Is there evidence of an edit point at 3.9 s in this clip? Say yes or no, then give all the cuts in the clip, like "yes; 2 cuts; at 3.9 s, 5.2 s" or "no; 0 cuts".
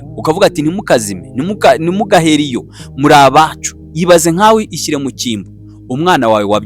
yes; 1 cut; at 3.9 s